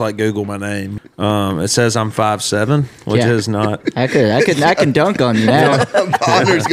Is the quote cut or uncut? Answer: cut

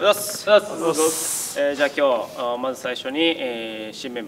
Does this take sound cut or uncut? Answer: uncut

